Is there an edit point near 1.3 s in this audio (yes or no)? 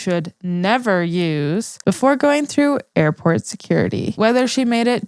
no